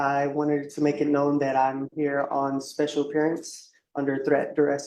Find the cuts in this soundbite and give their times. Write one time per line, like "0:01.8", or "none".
none